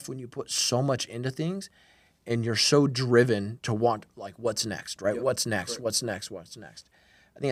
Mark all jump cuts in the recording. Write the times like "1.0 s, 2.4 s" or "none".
none